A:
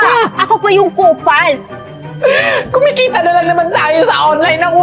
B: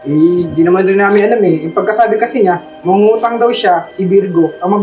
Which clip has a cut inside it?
A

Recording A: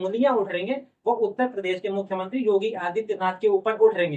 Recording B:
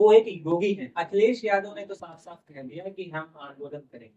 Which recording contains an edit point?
B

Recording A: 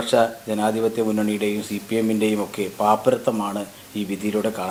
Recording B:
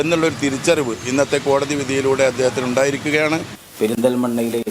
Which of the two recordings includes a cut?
B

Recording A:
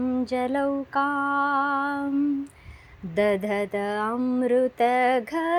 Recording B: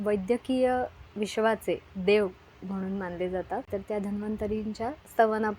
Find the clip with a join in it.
B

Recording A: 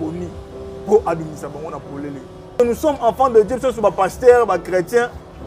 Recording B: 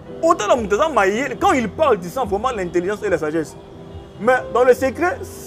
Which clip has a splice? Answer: A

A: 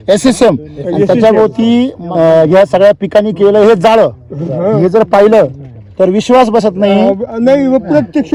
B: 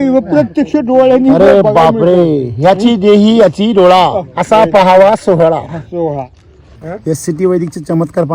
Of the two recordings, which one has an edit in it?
B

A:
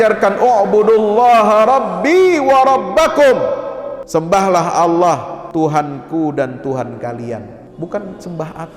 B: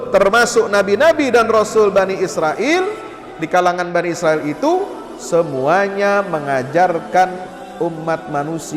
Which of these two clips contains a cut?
A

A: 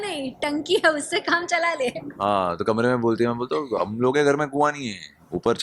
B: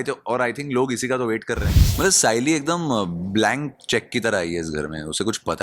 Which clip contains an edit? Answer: B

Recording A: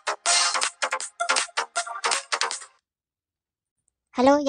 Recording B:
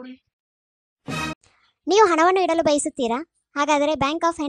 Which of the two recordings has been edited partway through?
B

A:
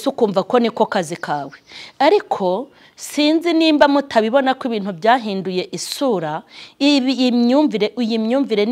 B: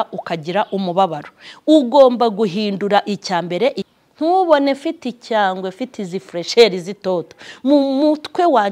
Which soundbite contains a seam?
B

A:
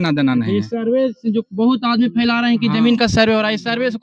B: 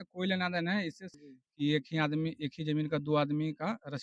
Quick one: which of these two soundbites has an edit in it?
B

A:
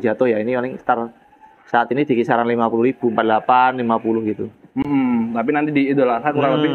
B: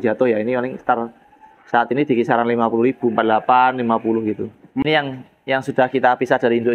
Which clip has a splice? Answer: B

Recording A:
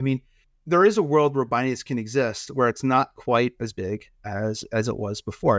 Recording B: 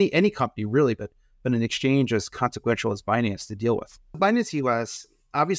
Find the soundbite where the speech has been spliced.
B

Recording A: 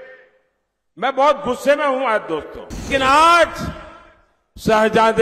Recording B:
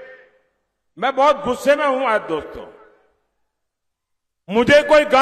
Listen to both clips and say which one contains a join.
A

